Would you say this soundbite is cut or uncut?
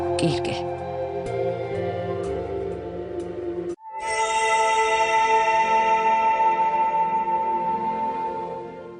cut